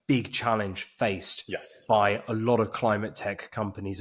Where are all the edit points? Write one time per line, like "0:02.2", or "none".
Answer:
none